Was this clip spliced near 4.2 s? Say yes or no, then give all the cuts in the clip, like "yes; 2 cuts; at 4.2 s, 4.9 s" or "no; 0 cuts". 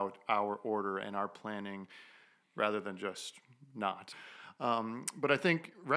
yes; 1 cut; at 4.2 s